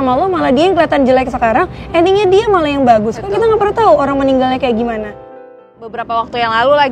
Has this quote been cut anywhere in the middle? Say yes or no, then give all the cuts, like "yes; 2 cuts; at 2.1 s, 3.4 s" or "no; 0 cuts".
yes; 1 cut; at 5.4 s